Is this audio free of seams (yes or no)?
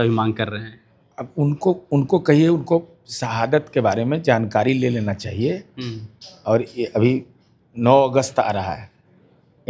yes